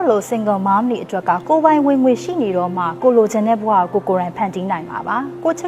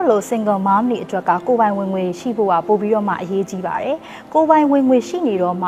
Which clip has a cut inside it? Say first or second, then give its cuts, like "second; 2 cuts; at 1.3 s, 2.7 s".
first; 1 cut; at 1.4 s